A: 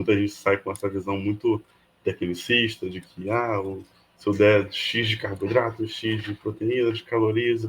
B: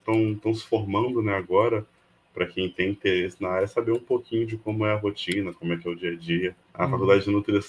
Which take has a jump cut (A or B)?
B